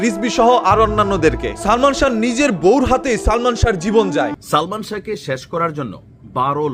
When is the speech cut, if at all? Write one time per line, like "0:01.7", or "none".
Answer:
0:04.3